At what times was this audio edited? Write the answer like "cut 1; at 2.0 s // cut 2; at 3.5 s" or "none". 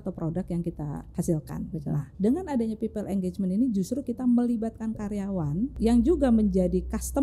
cut 1; at 1.0 s // cut 2; at 2.1 s // cut 3; at 5.8 s

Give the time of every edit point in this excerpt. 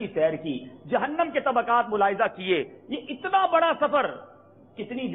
none

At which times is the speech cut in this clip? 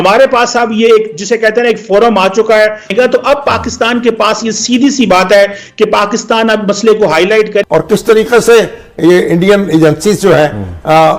cut 1; at 2.9 s // cut 2; at 7.6 s

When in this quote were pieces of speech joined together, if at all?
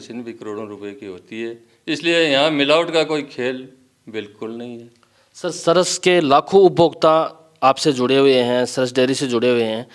none

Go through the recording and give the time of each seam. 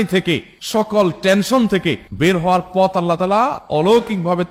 none

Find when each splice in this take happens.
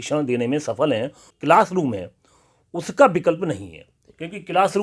cut 1; at 1.3 s

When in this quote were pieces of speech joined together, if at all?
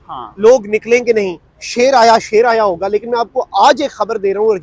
none

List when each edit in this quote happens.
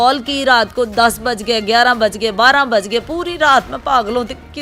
none

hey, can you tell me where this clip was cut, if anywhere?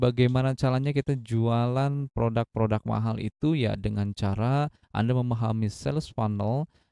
none

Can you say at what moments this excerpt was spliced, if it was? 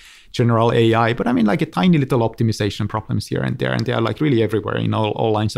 none

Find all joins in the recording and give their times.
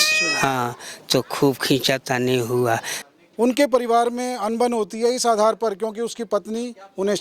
cut 1; at 3.0 s

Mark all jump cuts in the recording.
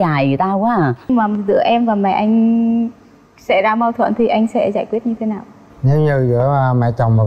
cut 1; at 1.1 s

